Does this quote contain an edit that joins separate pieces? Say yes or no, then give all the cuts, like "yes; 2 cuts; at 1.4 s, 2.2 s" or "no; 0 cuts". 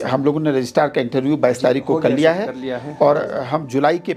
no; 0 cuts